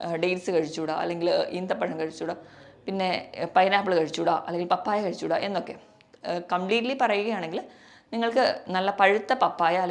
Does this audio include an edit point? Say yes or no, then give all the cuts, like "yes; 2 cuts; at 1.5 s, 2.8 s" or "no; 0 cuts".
no; 0 cuts